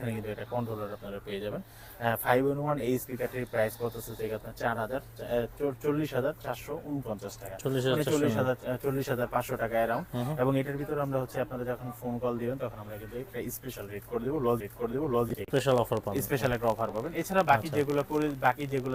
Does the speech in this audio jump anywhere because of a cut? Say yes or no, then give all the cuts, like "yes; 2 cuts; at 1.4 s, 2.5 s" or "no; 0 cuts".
no; 0 cuts